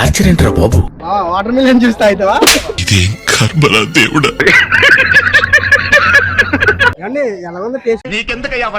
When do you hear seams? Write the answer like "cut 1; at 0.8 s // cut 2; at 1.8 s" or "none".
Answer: cut 1; at 7.0 s